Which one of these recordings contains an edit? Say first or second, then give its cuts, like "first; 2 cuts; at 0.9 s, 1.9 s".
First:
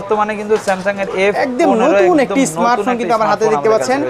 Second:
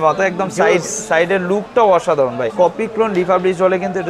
second; 1 cut; at 2.5 s